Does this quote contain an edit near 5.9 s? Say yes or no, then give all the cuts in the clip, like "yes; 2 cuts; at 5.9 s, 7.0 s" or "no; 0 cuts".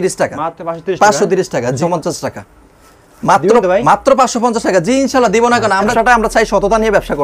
yes; 2 cuts; at 1.8 s, 5.9 s